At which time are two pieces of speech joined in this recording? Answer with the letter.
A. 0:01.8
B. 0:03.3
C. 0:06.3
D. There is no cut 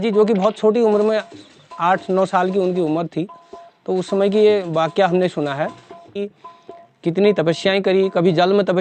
C